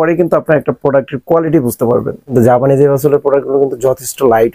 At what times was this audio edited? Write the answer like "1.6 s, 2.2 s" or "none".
2.3 s